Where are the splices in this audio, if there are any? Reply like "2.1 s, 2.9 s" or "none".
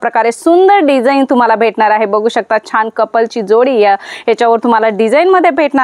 none